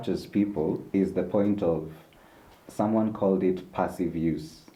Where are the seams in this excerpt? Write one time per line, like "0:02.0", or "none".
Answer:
none